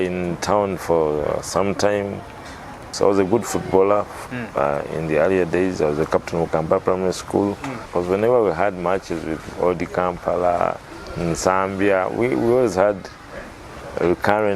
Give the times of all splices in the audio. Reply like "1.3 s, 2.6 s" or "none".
2.9 s, 7.9 s

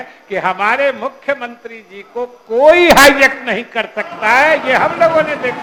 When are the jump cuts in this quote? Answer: none

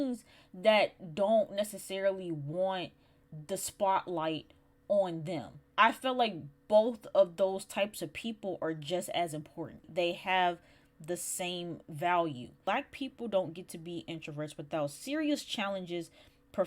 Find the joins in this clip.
5.6 s, 9.9 s, 12.6 s

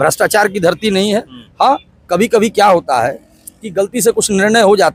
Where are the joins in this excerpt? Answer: none

